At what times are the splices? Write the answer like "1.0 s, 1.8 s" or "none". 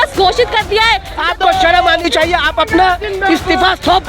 1.2 s